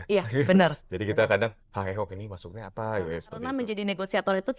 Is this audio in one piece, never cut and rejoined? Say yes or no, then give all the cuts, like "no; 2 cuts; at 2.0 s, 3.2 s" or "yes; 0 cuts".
no; 1 cut; at 3.5 s